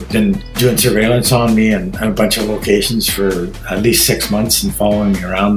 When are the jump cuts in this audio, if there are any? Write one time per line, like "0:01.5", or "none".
none